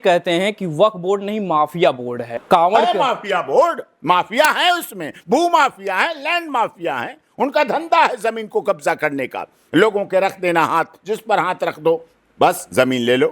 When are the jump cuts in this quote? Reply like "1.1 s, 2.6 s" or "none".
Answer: 2.4 s